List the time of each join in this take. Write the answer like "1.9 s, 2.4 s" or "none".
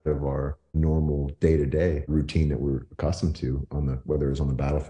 0.8 s, 2.1 s